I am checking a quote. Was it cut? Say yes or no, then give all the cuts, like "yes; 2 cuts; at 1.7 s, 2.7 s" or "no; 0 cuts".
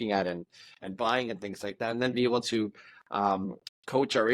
no; 0 cuts